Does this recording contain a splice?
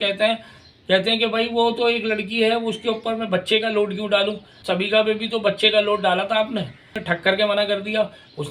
yes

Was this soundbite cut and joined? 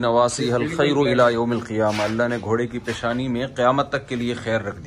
no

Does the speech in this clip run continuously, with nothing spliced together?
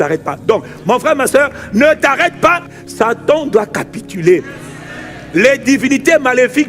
no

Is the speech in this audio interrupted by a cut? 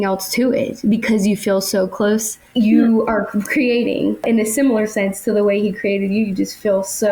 yes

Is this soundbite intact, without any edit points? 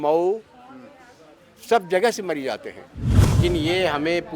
no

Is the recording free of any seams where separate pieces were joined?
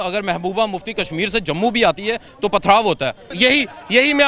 no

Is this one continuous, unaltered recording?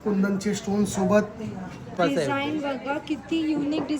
no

